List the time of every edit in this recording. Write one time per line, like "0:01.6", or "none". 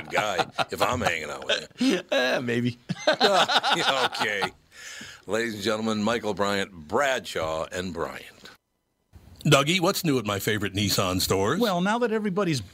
0:09.3